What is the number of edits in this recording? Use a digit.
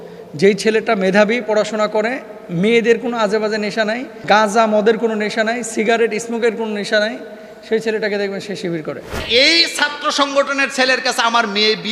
2